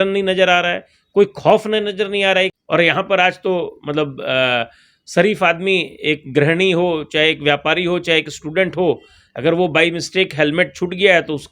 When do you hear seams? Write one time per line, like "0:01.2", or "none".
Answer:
0:02.6